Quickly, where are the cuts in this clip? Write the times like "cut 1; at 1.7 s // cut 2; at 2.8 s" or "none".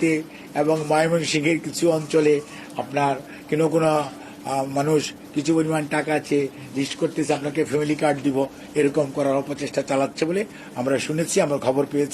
none